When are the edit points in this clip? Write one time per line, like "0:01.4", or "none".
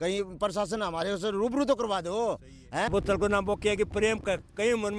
0:02.9